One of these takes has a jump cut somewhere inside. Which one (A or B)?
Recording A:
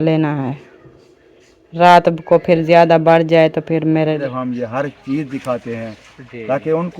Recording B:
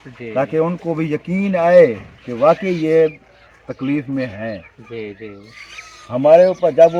A